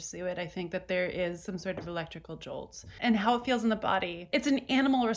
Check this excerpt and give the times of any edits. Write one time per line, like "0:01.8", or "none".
0:02.9
0:04.2

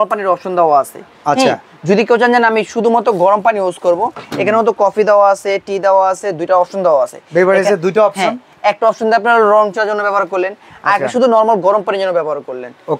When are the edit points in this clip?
none

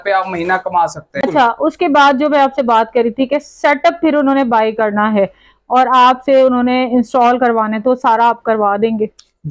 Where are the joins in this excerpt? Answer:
0:01.2

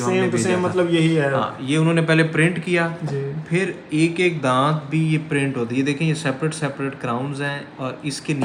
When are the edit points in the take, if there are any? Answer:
none

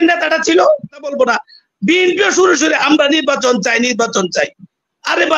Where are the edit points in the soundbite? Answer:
0:01.1

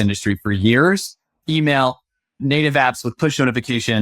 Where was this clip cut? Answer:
0:01.4
0:02.4

